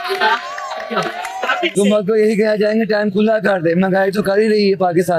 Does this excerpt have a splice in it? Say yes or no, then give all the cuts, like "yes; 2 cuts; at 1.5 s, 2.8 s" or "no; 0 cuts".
yes; 1 cut; at 1.7 s